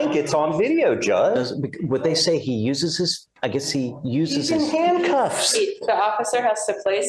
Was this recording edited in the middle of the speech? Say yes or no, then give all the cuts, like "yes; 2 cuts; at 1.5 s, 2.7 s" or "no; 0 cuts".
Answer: no; 0 cuts